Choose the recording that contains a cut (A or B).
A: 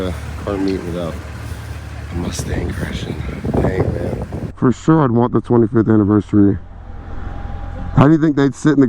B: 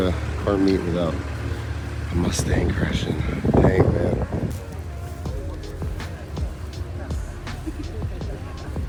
A